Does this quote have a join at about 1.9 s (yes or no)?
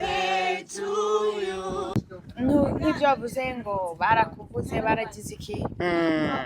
yes